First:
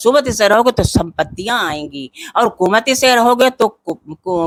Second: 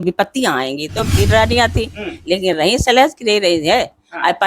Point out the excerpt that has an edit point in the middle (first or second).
second